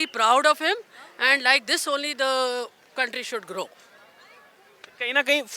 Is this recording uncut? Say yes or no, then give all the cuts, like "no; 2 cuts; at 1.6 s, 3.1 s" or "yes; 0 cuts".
yes; 0 cuts